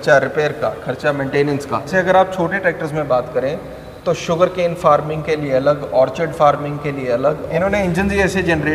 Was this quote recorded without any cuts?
no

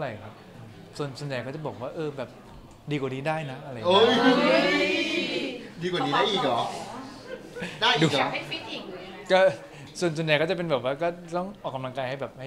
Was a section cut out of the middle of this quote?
no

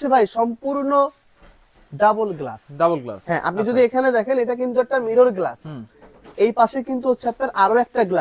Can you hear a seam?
no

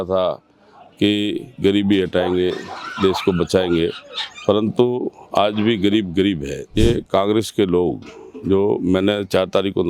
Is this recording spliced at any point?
yes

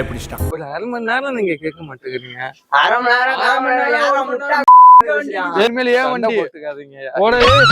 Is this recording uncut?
no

